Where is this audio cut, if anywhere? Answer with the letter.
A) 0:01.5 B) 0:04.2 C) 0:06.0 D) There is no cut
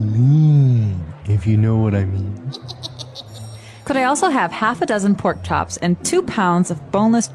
D